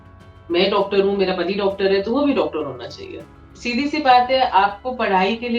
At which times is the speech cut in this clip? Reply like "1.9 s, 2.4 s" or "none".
3.5 s